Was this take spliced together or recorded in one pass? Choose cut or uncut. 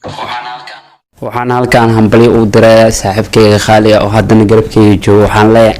uncut